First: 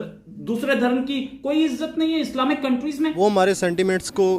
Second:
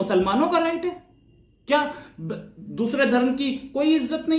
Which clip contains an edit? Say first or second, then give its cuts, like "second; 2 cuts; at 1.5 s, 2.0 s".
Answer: first; 1 cut; at 3.1 s